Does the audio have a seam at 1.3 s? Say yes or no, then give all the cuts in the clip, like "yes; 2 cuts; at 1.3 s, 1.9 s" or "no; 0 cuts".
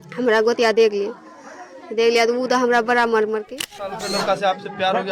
no; 1 cut; at 4.0 s